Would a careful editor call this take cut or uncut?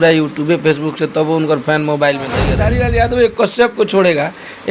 cut